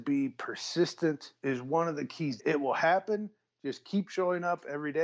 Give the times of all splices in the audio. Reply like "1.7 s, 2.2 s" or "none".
1.3 s, 2.4 s